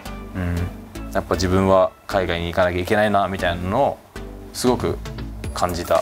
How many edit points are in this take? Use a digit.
0